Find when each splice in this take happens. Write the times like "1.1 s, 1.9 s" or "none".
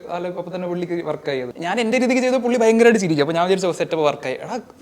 1.5 s